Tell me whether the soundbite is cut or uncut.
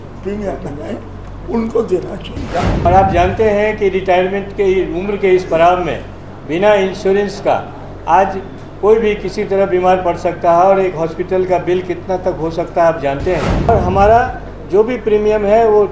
cut